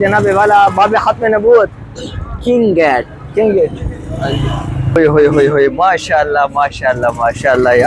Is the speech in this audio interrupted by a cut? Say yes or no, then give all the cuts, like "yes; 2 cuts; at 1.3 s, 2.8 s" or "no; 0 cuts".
yes; 1 cut; at 4.9 s